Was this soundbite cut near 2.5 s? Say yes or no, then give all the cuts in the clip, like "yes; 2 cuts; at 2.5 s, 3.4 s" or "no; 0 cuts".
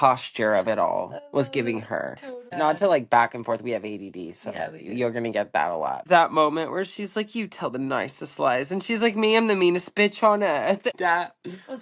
yes; 3 cuts; at 2.5 s, 6.0 s, 10.9 s